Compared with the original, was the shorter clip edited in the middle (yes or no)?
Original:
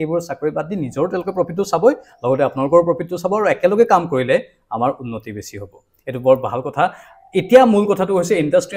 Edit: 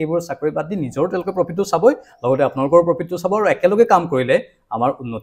no